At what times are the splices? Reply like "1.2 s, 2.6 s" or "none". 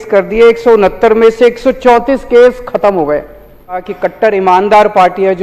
3.8 s